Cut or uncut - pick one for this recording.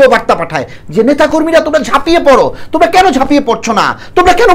uncut